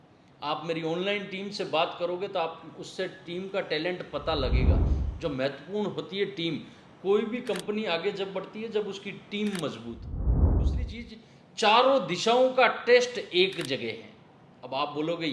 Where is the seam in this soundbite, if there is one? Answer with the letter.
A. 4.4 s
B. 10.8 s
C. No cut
B